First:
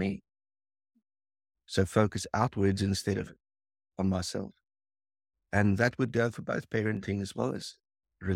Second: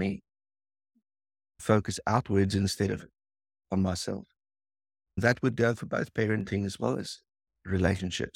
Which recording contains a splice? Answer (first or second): second